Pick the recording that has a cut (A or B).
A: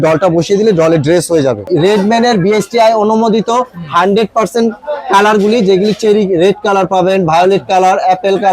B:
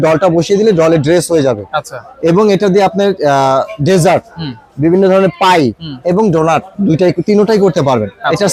A